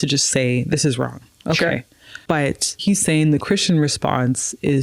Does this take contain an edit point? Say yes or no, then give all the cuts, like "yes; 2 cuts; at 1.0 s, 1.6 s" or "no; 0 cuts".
yes; 1 cut; at 2.3 s